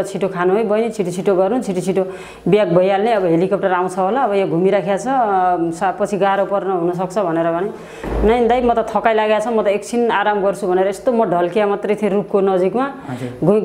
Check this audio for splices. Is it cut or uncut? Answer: uncut